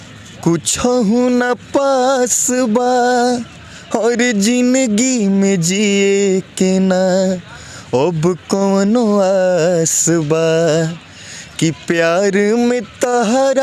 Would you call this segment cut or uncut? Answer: uncut